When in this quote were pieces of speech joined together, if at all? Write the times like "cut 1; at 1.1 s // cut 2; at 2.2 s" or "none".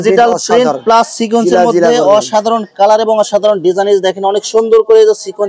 none